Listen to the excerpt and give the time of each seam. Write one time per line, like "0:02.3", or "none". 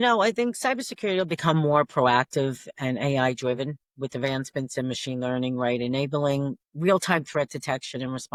none